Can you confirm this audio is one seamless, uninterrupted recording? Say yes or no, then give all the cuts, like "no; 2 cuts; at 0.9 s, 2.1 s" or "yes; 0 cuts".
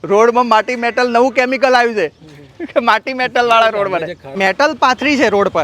no; 1 cut; at 4.3 s